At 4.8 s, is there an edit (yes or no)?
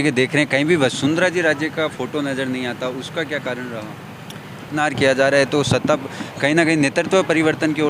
yes